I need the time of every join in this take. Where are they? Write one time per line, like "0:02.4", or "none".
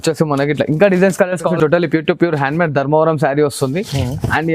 0:01.4

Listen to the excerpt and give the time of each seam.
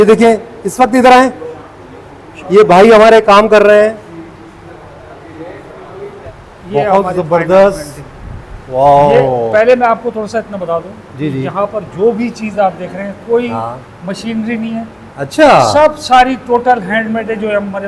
0:06.3

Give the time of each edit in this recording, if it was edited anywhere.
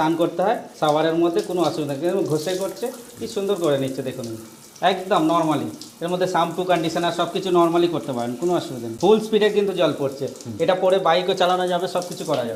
none

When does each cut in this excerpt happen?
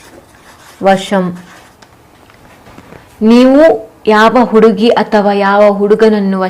0:01.6

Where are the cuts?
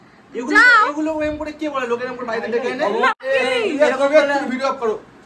0:03.3

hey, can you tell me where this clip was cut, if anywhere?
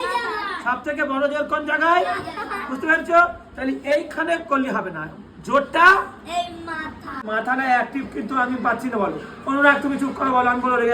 0:07.2

